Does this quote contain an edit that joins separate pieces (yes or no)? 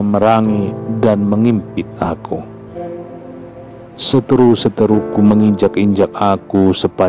no